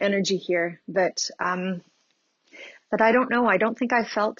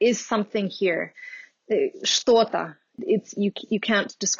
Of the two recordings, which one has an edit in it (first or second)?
second